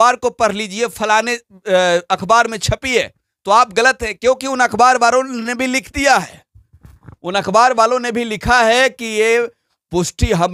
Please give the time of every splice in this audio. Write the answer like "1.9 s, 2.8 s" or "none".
none